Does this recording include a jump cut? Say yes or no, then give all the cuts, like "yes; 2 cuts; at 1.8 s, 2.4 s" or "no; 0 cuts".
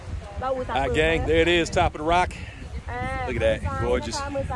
no; 0 cuts